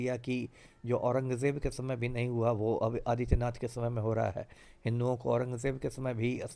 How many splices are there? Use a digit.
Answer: 0